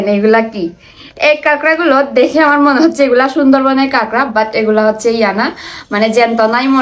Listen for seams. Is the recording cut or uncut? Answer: uncut